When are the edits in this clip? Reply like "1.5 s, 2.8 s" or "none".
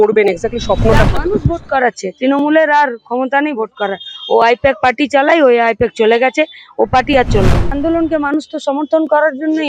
1.2 s, 7.8 s

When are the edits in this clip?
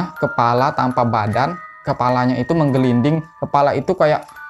1.8 s, 3.3 s

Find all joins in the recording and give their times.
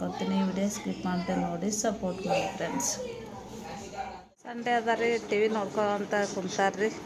4.6 s

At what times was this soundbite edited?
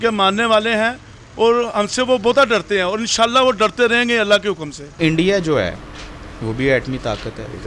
4.9 s

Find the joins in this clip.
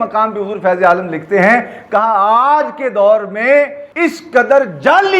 3.8 s

